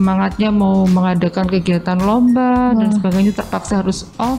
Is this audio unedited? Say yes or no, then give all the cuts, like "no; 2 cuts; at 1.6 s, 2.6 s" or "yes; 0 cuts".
yes; 0 cuts